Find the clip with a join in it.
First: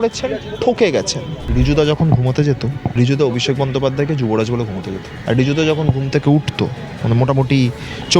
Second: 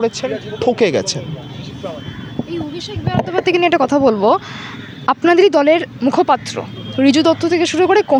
first; 4 cuts; at 1.3 s, 2.8 s, 5.1 s, 6.9 s

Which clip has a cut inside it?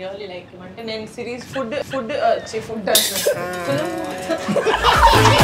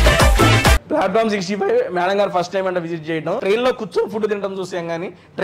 second; 2 cuts; at 0.8 s, 3.4 s

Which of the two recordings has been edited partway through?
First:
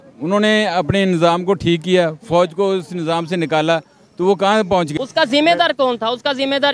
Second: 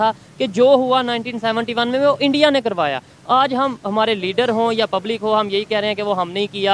first; 1 cut; at 4.9 s

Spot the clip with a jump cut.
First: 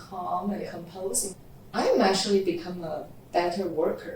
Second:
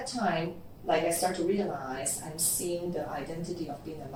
first; 1 cut; at 1.3 s

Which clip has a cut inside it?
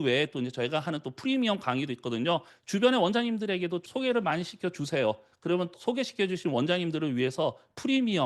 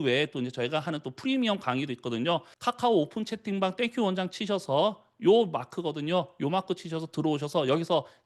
first; 3 cuts; at 2.5 s, 3.8 s, 5.7 s

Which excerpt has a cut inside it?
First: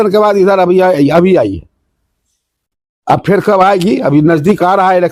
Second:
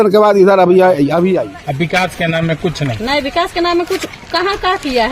second; 1 cut; at 1.4 s

